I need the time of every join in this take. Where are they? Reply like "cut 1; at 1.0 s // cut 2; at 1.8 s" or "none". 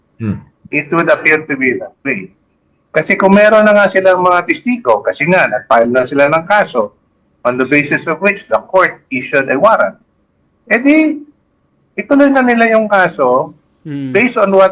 none